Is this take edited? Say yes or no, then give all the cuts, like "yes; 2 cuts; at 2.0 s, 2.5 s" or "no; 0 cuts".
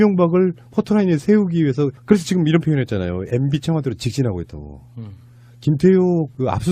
yes; 1 cut; at 1.3 s